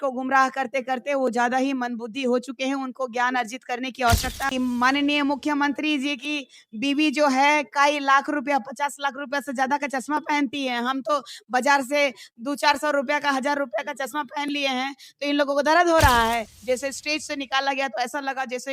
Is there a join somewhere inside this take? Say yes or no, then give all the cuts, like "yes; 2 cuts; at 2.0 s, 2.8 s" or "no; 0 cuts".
yes; 2 cuts; at 4.5 s, 16.5 s